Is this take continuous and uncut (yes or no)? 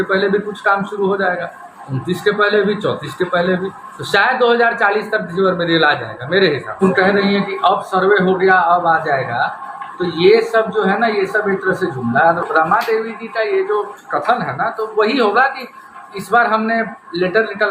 no